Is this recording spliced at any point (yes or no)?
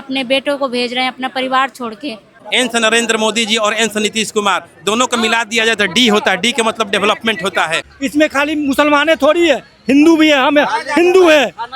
yes